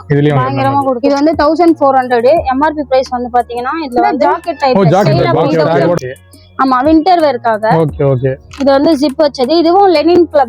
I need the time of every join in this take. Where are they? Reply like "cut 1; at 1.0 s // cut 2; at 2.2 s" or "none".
cut 1; at 1.0 s // cut 2; at 4.2 s